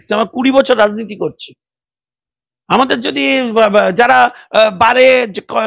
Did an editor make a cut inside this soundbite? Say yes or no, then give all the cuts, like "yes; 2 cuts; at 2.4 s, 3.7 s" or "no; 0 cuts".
no; 0 cuts